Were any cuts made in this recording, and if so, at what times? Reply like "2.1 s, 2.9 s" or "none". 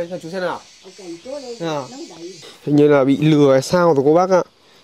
2.5 s